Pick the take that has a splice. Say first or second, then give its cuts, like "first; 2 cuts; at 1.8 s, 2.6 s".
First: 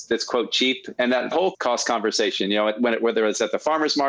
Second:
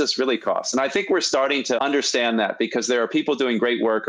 first; 1 cut; at 1.3 s